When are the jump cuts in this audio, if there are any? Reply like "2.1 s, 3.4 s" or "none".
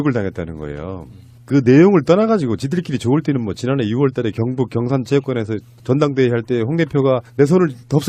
5.2 s